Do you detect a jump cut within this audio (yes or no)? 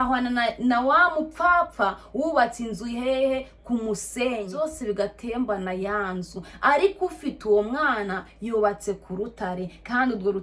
yes